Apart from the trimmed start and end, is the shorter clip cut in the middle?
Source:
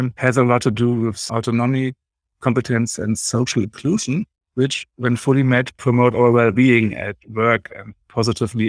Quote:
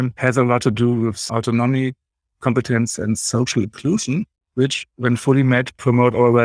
no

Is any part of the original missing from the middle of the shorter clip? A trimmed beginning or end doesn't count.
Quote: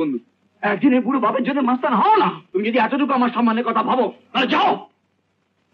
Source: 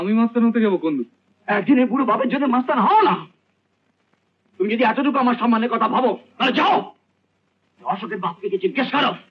yes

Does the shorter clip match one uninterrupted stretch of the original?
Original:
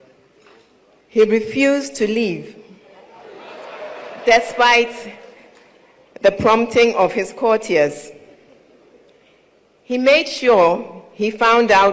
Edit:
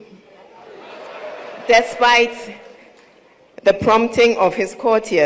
yes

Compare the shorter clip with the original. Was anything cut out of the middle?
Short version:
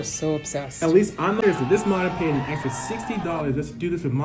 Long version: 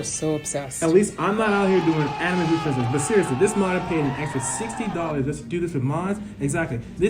yes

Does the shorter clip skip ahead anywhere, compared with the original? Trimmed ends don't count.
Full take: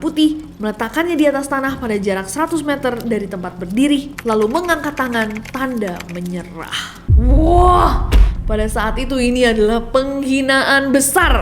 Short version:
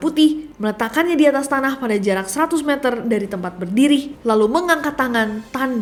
no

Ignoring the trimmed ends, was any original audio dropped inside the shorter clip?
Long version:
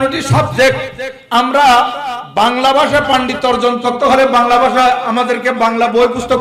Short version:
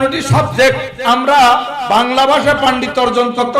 yes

